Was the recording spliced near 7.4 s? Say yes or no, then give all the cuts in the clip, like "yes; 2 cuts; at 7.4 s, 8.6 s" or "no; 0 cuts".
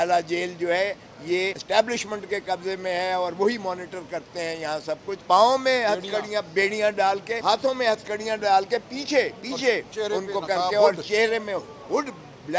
yes; 3 cuts; at 1.6 s, 5.2 s, 7.4 s